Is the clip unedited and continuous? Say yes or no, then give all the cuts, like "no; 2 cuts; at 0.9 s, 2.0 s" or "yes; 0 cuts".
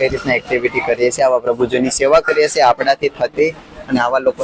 yes; 0 cuts